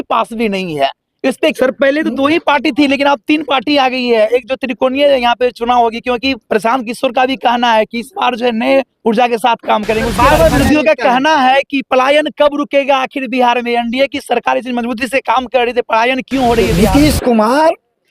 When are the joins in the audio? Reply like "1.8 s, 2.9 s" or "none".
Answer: 1.5 s, 10.1 s, 16.7 s